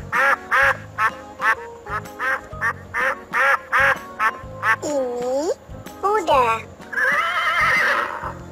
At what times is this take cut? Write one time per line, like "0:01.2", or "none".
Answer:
none